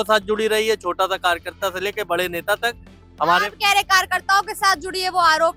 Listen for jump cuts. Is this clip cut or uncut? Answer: uncut